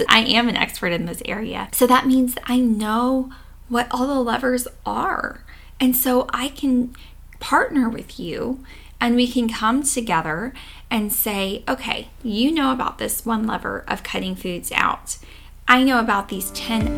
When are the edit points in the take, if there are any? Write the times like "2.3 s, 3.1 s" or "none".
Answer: 1.6 s